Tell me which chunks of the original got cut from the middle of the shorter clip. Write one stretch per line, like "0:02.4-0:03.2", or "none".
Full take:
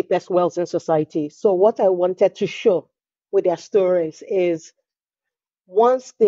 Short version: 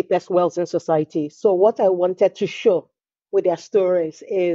none